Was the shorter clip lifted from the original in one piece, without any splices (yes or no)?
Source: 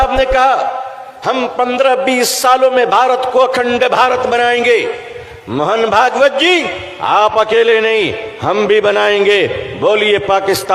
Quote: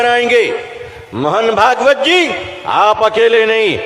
yes